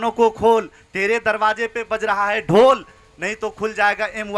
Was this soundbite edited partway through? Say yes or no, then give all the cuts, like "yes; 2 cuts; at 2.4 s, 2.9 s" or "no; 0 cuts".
no; 0 cuts